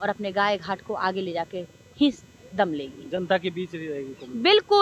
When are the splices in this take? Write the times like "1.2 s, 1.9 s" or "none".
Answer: none

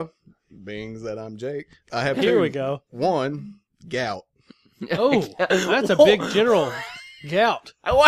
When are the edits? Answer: 2.9 s

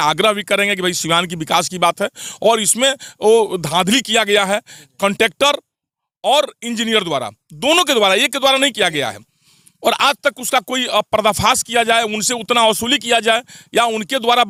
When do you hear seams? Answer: none

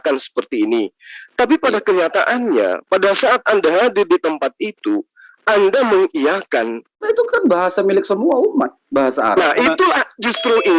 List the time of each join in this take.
7.0 s

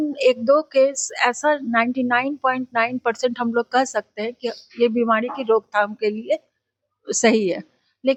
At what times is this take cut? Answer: none

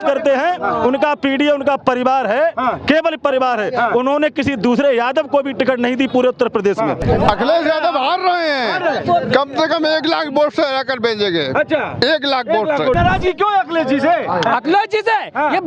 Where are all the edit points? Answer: 7.0 s, 13.0 s

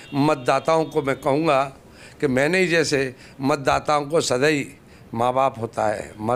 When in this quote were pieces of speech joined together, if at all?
none

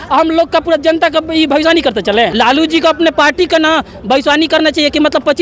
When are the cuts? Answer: 2.3 s

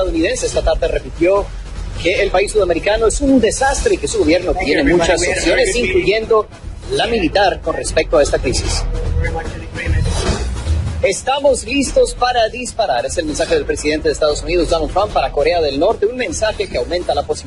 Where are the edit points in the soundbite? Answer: none

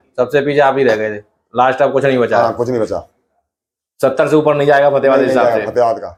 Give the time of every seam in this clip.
none

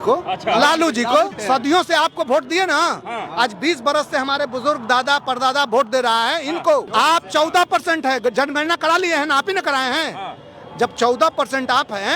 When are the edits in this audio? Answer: 1.4 s, 6.9 s

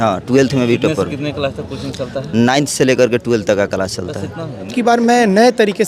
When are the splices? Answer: 4.7 s

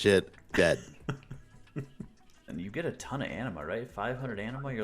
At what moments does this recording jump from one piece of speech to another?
2.5 s

